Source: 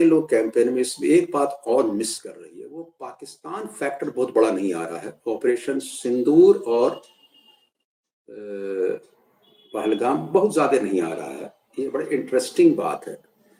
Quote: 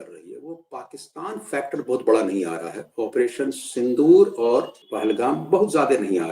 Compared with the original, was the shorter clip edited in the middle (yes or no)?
yes